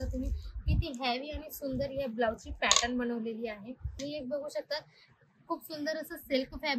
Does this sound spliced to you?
yes; 1 cut; at 4.0 s

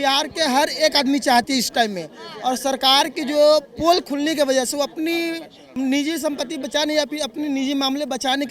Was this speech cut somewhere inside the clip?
no; 0 cuts

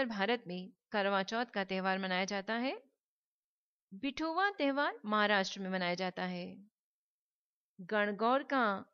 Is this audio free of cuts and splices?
no; 1 cut; at 1.1 s

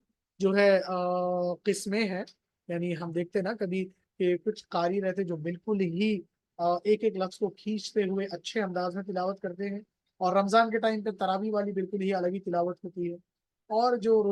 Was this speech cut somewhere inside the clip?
no; 0 cuts

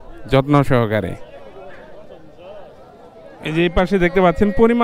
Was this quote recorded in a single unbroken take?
no; 1 cut; at 3.2 s

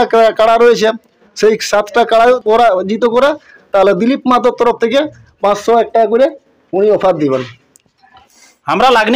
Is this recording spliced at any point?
yes; 2 cuts; at 2.4 s, 7.8 s

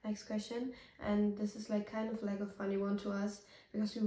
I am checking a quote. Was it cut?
no; 0 cuts

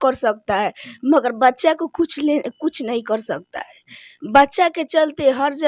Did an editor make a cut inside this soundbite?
no; 0 cuts

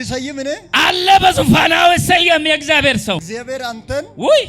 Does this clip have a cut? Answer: yes; 1 cut; at 3.2 s

